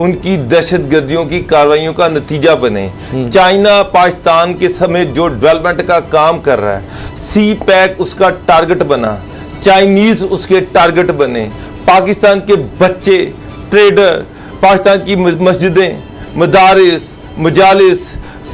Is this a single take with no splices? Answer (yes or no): yes